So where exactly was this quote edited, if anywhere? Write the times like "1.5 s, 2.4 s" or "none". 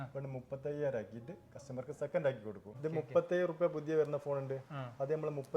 2.7 s

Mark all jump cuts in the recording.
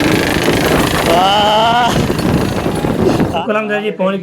3.3 s

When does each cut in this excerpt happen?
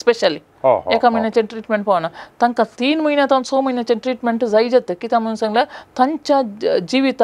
none

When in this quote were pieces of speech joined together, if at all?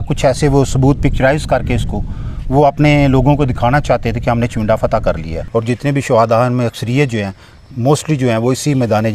5.4 s

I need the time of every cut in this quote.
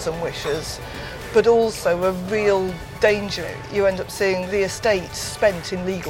3.3 s, 4.5 s

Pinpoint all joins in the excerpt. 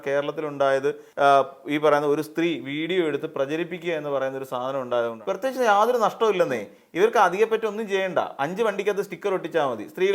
1.0 s, 5.2 s

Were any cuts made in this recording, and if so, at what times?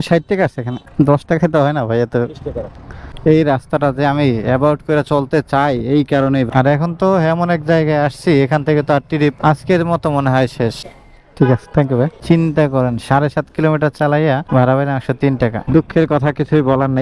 3.1 s, 6.5 s, 10.8 s, 12.2 s, 15.7 s

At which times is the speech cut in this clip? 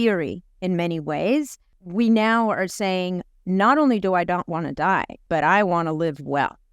5.2 s

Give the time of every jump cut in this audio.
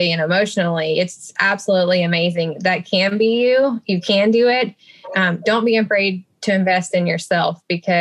1.4 s

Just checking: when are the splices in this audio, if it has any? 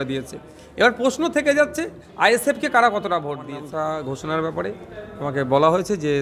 3.5 s

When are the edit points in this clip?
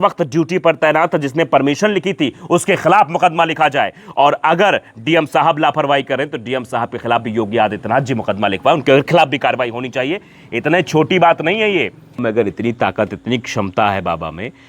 12.2 s

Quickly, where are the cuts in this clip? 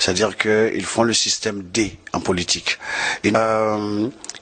3.3 s

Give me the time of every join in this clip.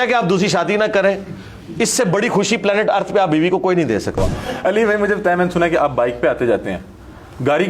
4.2 s

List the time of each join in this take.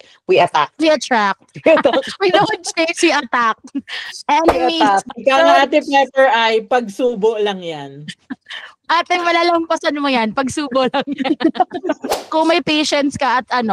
5.1 s, 12.1 s

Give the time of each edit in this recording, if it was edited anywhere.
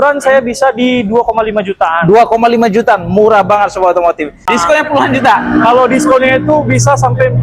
4.5 s

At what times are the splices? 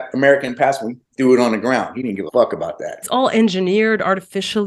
2.2 s, 2.9 s

